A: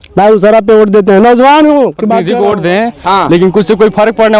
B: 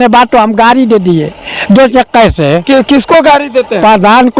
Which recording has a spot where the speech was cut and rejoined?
A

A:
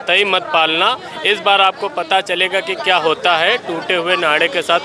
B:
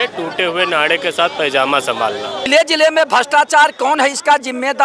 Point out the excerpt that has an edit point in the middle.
B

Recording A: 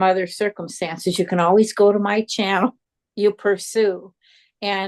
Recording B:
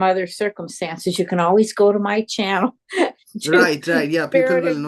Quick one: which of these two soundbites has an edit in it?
A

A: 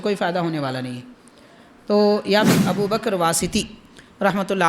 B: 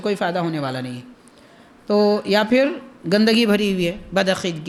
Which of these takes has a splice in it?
A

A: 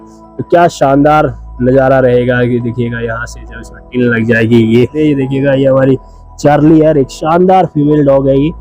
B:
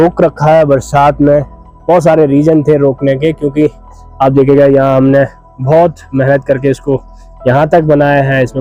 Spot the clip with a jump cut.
A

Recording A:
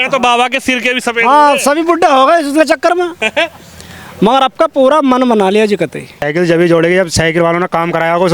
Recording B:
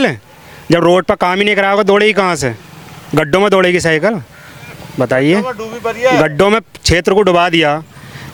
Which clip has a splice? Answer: A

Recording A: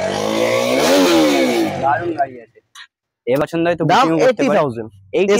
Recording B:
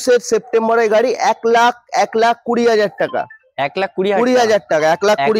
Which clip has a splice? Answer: A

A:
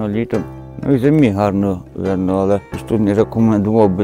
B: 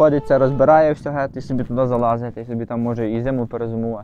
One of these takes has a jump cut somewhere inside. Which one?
A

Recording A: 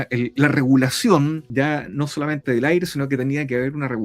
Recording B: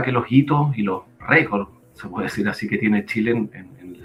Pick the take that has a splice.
A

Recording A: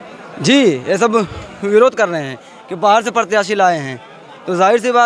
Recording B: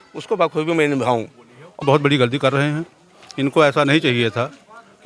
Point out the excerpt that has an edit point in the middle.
B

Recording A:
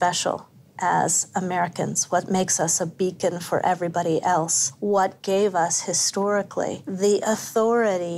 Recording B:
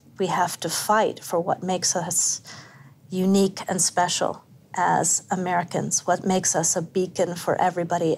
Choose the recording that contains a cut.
A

